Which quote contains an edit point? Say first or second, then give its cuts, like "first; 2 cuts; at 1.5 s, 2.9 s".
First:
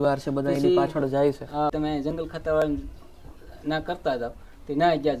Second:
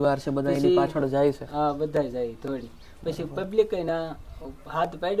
first; 1 cut; at 1.7 s